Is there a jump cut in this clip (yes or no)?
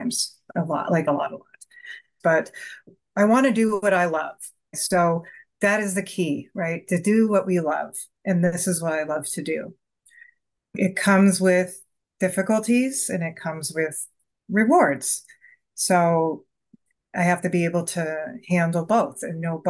yes